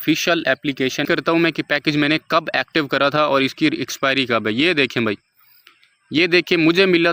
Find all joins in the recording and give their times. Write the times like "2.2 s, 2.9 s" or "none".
1.0 s